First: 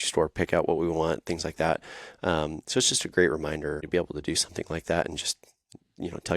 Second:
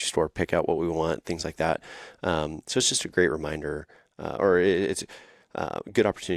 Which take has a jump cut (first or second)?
first